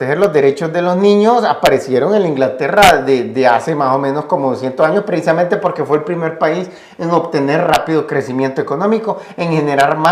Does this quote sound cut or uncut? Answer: uncut